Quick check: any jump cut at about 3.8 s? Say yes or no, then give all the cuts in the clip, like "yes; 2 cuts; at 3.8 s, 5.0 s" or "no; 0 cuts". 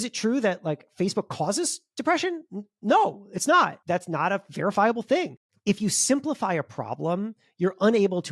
yes; 2 cuts; at 3.8 s, 5.5 s